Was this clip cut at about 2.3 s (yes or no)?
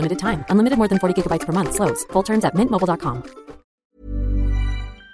no